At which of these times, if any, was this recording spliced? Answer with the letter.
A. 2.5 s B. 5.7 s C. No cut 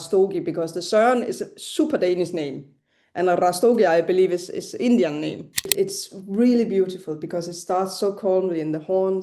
B